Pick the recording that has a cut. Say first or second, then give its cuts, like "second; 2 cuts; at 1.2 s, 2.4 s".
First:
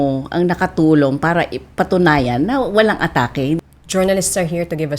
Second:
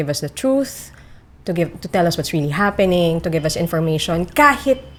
first; 1 cut; at 3.6 s